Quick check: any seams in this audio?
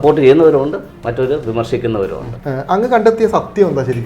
yes; 1 cut; at 2.3 s

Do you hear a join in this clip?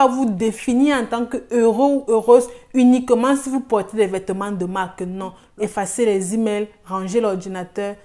yes; 1 cut; at 5.4 s

